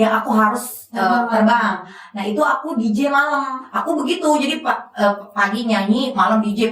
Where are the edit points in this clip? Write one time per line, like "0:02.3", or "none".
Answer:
0:03.6

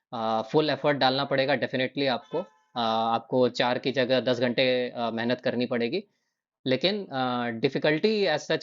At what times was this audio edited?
none

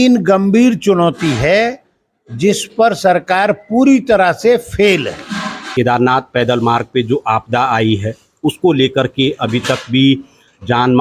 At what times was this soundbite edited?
0:05.6

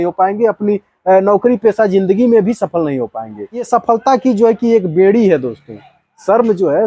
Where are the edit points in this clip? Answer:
0:03.7

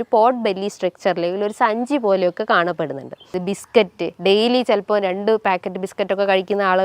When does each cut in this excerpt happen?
0:03.4

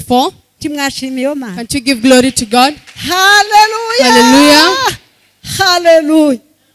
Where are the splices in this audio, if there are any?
none

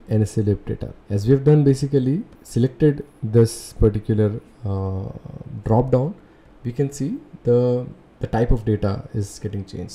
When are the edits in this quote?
0:00.9
0:02.4
0:07.3

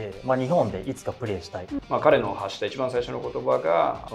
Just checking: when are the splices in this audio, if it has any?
0:01.7

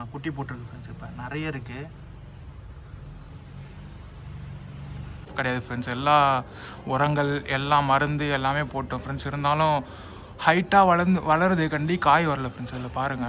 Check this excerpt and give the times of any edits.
0:05.3

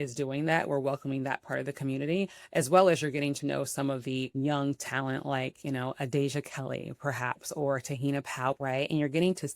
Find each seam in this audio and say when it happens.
0:04.3
0:08.6

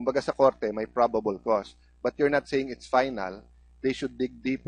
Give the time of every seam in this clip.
0:03.7

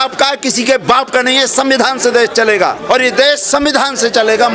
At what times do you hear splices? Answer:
0:02.8

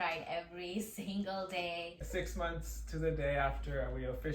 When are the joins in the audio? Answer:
0:01.9

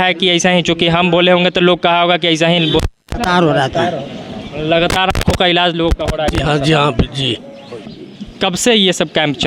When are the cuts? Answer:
none

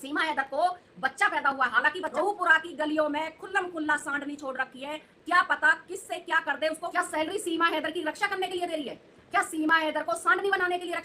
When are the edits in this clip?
0:02.1
0:06.9

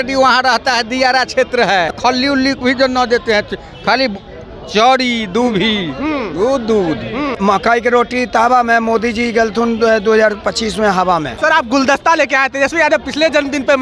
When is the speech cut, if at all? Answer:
0:02.0
0:07.3
0:11.3

